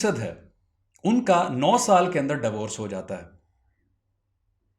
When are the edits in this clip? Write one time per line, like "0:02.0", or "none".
none